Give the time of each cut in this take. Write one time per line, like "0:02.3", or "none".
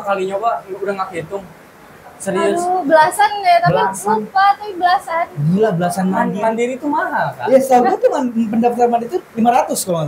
none